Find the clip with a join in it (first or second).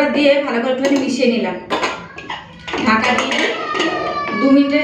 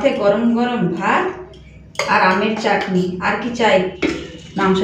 second